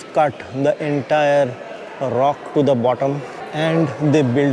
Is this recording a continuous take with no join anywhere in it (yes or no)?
no